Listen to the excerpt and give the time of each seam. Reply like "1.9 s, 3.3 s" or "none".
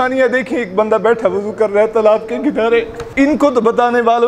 3.1 s